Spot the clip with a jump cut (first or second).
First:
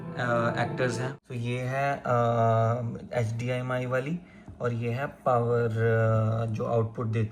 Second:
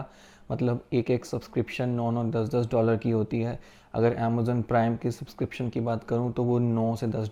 first